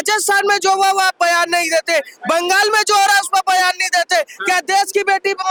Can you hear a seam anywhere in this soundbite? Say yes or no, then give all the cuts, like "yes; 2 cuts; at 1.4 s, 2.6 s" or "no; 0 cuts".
no; 0 cuts